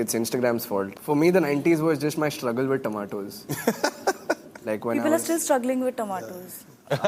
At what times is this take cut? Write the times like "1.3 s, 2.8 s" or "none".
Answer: 1.0 s